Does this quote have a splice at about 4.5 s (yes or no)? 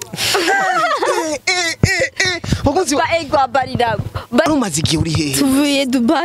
yes